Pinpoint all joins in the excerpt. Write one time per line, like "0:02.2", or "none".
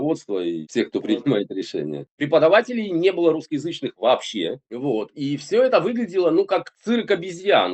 0:02.1
0:06.7